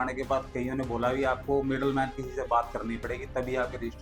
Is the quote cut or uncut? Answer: uncut